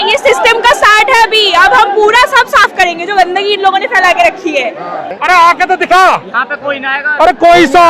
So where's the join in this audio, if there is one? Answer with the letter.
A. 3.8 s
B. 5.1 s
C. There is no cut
B